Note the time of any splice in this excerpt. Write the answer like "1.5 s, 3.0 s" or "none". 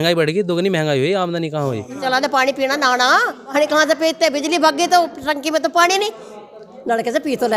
2.0 s, 3.5 s